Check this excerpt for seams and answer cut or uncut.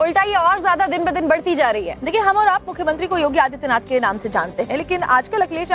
cut